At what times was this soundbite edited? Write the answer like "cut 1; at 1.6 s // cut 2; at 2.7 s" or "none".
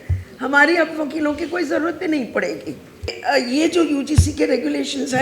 cut 1; at 3.2 s